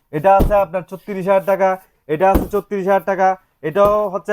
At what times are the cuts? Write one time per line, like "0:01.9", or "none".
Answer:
none